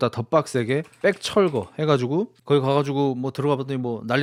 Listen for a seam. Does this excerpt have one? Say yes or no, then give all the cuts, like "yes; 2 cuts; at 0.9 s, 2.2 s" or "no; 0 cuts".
no; 0 cuts